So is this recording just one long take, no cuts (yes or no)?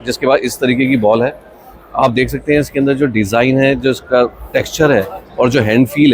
yes